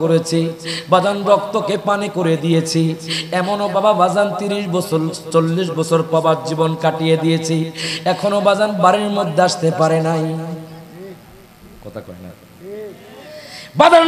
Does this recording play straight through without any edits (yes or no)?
yes